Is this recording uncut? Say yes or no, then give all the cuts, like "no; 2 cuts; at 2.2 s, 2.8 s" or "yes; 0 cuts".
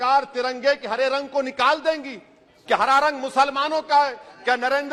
yes; 0 cuts